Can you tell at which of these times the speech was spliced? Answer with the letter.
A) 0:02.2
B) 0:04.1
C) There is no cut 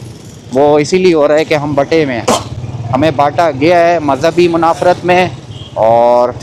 C